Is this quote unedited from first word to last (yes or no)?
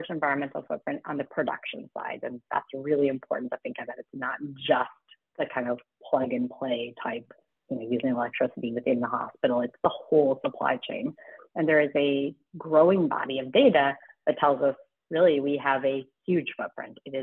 yes